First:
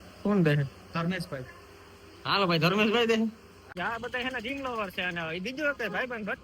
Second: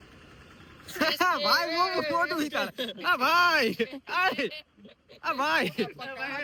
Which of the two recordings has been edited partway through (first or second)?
first